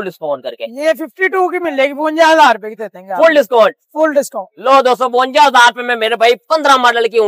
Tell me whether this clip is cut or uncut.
uncut